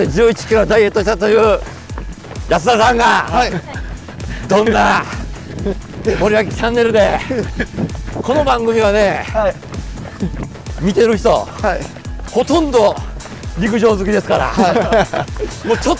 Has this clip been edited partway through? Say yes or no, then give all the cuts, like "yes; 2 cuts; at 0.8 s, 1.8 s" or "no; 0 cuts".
no; 0 cuts